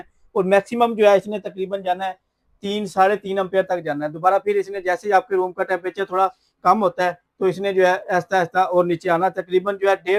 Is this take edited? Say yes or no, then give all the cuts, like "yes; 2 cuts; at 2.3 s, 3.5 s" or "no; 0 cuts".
no; 0 cuts